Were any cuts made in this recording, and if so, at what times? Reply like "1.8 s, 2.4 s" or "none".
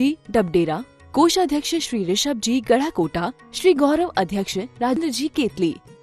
5.0 s